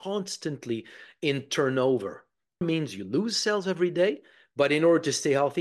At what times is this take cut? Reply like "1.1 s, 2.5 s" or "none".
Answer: 2.6 s

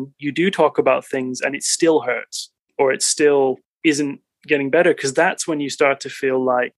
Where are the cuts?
none

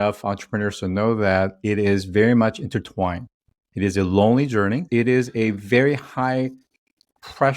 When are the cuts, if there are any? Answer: 4.9 s

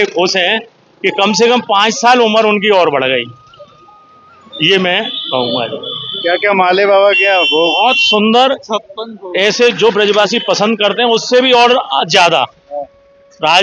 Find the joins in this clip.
none

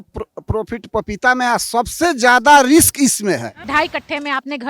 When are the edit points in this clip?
3.7 s

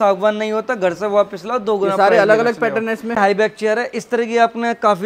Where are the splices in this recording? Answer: 3.2 s

